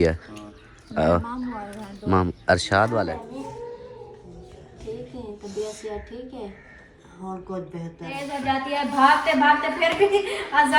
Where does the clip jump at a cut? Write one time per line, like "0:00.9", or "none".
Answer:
0:03.1
0:08.3